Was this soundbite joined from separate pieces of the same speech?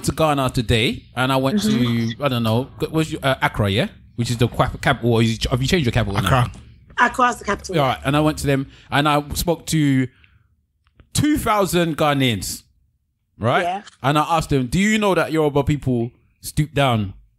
no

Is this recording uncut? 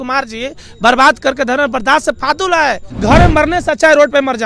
no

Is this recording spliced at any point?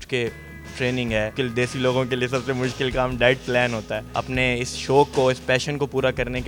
yes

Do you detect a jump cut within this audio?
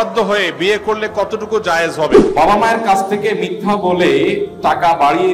yes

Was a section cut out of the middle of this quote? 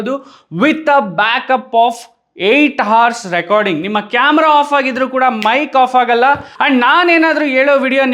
yes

